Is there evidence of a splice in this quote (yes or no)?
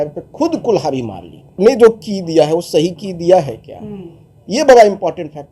yes